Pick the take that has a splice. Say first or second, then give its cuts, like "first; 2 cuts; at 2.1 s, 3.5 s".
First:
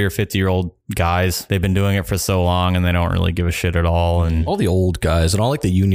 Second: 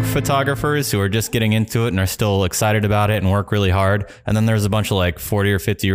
first; 2 cuts; at 1.4 s, 4.5 s